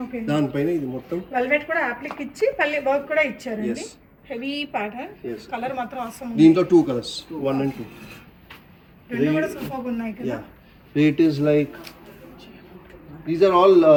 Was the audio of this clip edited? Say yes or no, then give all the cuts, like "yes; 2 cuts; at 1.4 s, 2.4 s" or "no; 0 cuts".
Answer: no; 0 cuts